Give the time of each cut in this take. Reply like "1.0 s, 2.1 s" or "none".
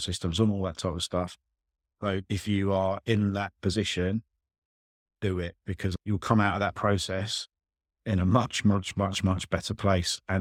none

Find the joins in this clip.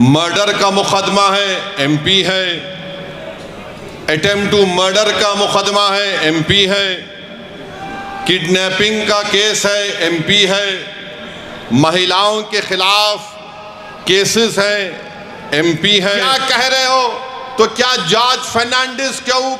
16.3 s

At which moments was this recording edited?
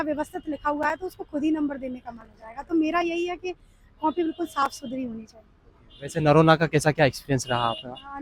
none

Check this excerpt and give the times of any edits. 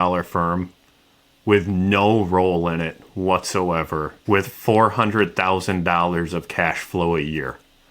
4.1 s

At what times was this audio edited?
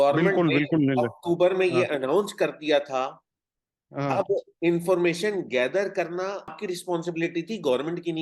6.5 s

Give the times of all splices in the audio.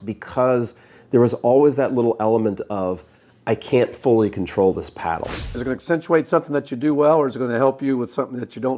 5.6 s

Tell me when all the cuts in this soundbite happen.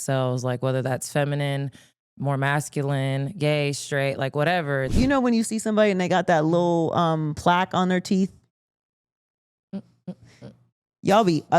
4.9 s

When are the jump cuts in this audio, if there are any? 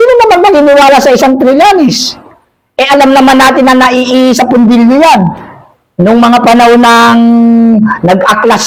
none

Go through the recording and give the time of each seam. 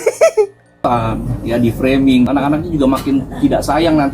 0.8 s, 2.3 s

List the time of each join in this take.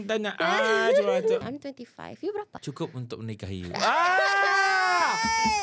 1.4 s, 2.5 s

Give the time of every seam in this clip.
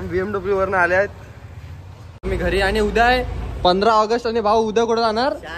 2.3 s

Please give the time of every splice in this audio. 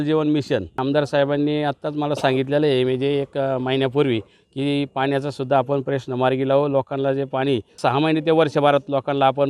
0.8 s, 7.8 s

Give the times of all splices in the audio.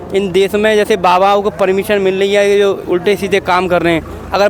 none

